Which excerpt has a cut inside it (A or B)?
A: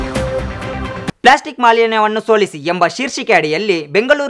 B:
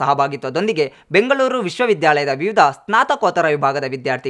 A